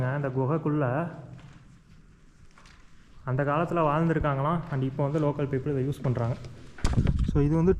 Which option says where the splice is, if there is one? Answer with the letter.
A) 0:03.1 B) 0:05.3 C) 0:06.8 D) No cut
C